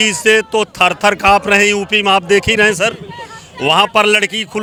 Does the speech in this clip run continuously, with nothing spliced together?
yes; 0 cuts

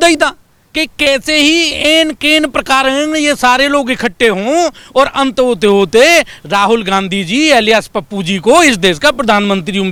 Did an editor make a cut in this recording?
no; 0 cuts

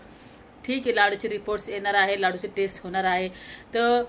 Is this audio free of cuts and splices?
yes; 0 cuts

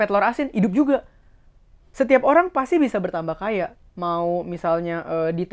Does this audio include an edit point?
yes; 1 cut; at 1.8 s

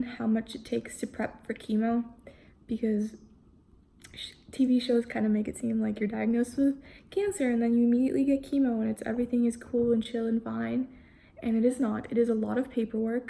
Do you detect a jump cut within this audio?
no; 0 cuts

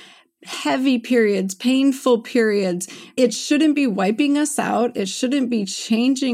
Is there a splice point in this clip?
yes; 1 cut; at 3.1 s

